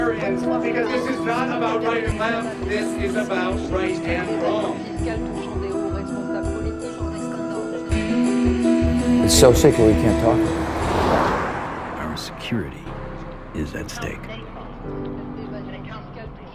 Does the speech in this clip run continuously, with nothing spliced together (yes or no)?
yes